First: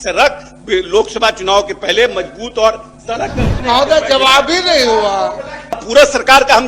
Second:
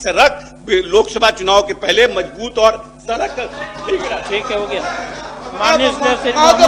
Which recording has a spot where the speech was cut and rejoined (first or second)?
first